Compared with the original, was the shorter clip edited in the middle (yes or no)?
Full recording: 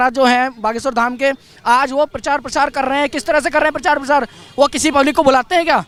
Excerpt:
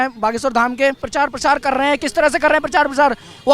yes